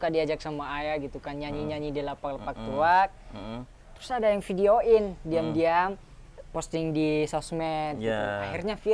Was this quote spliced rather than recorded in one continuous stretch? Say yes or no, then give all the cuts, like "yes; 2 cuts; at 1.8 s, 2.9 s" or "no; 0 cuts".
no; 0 cuts